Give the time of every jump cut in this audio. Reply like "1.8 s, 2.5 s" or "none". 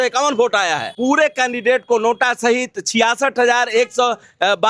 0.9 s